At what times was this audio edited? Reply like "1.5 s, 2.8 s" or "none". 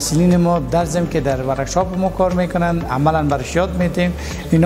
none